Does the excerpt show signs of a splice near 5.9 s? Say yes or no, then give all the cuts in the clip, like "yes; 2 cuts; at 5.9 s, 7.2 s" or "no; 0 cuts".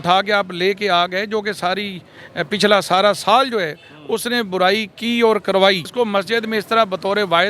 yes; 1 cut; at 5.9 s